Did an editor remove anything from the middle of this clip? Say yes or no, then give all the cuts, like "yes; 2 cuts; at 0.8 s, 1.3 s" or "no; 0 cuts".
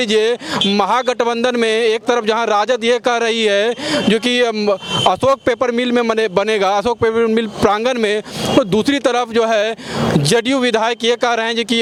no; 0 cuts